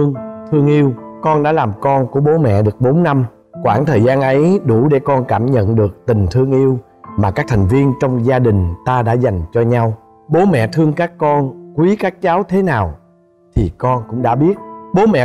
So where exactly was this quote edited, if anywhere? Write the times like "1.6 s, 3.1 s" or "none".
none